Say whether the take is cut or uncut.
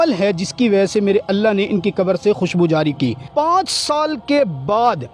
cut